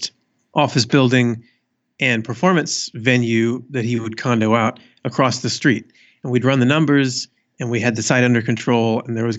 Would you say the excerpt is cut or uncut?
uncut